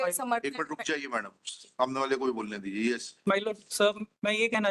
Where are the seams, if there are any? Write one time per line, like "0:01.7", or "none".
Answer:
none

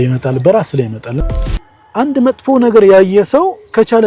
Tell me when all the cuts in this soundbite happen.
0:01.4

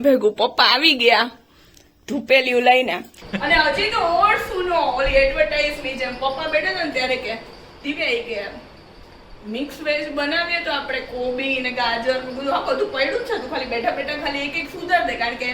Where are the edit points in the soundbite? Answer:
0:03.1

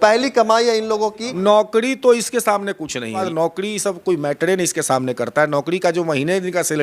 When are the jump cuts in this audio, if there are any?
0:01.3
0:03.3

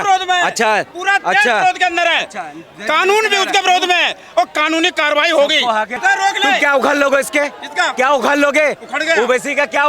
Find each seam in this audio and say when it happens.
0:05.9

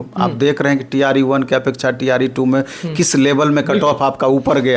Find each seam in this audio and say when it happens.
none

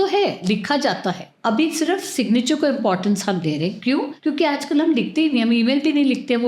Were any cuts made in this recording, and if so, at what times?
0:01.3
0:04.1

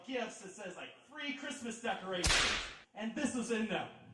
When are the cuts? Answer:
none

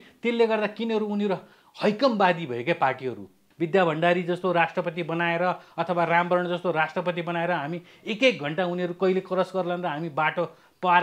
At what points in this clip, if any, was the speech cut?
0:03.4

